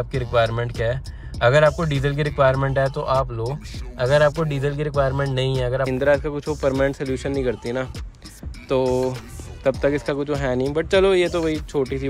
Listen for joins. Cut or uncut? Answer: cut